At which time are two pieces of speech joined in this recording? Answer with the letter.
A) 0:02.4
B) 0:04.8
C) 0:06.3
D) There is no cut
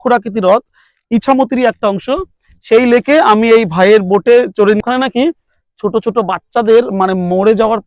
B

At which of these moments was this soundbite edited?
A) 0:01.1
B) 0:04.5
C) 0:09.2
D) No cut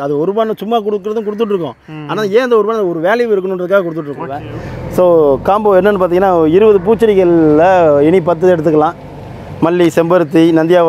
B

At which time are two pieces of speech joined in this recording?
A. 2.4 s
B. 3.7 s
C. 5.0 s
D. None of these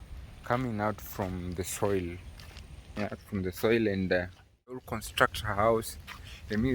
C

